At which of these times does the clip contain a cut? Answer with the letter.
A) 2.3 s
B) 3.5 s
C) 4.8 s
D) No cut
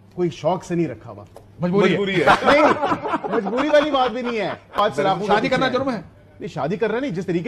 C